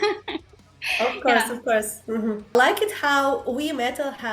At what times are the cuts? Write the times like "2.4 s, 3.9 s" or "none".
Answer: 2.5 s